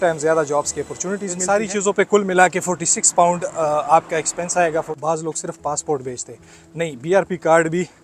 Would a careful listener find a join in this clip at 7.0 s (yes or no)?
no